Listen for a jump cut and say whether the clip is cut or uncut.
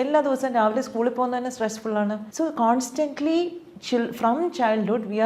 cut